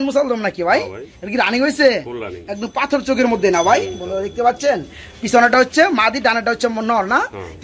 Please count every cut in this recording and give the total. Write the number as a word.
zero